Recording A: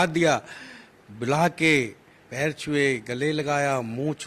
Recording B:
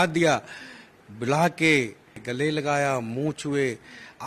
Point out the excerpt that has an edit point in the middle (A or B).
B